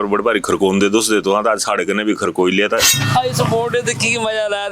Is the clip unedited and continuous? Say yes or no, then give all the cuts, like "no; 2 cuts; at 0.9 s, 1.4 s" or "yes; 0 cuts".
no; 1 cut; at 2.9 s